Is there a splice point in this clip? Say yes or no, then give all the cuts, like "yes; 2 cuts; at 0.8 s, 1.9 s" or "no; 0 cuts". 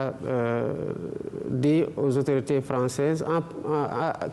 yes; 1 cut; at 1.7 s